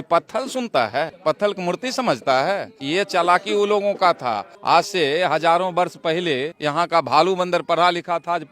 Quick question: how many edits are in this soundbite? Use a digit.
4